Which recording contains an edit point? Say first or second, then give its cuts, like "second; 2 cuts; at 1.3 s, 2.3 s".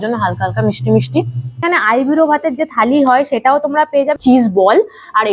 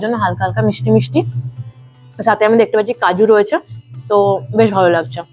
first; 2 cuts; at 1.6 s, 4.2 s